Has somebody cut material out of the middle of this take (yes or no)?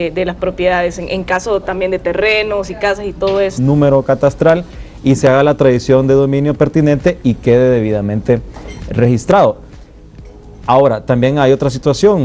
no